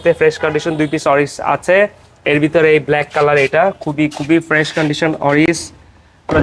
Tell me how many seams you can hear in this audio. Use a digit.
0